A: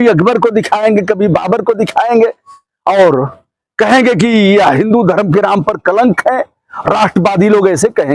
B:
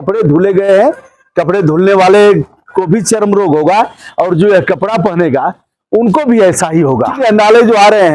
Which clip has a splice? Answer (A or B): B